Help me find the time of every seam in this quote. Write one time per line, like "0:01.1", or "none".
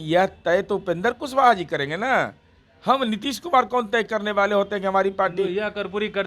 none